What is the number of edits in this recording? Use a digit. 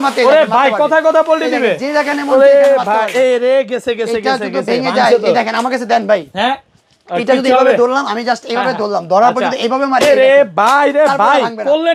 0